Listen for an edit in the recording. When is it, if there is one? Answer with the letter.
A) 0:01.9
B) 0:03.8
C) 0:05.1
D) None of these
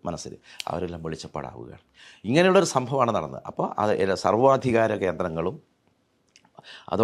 D